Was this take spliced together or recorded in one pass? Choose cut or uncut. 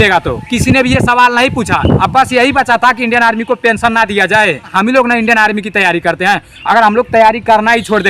cut